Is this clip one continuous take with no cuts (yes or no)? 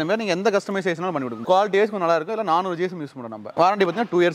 no